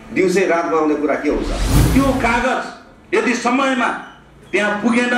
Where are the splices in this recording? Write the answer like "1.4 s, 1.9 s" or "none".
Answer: 1.7 s